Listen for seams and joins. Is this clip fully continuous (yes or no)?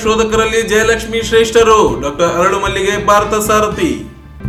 yes